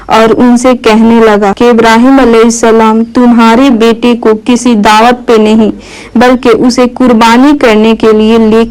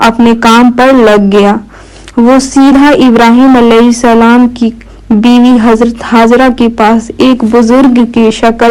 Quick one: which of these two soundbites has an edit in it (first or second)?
first